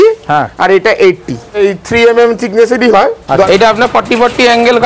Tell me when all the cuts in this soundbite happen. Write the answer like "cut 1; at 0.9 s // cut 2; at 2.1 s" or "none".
cut 1; at 1.6 s // cut 2; at 3.5 s